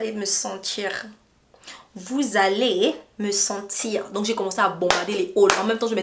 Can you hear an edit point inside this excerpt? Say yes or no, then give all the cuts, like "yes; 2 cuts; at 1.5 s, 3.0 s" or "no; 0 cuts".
no; 0 cuts